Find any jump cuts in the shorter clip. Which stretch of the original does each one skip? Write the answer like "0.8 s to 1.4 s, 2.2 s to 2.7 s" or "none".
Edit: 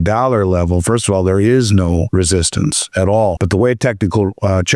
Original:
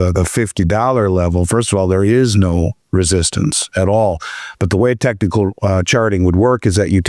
2.7 s to 2.9 s, 4.2 s to 4.6 s